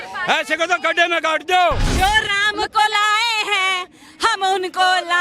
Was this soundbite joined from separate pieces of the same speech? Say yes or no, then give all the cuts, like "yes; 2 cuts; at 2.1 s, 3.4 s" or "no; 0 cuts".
yes; 1 cut; at 1.9 s